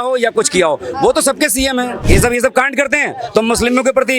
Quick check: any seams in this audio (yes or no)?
yes